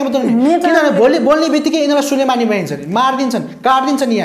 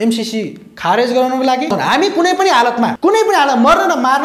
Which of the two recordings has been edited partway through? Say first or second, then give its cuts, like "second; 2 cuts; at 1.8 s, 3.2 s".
second; 2 cuts; at 1.7 s, 3.0 s